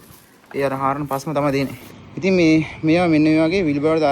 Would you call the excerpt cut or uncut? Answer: cut